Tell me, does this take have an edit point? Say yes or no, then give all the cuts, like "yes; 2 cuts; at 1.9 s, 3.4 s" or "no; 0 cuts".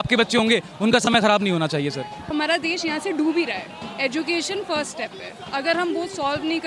yes; 1 cut; at 2.2 s